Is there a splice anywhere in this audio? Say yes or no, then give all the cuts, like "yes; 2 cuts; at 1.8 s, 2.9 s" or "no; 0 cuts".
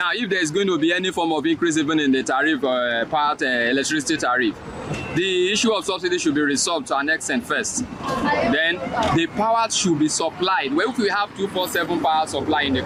no; 0 cuts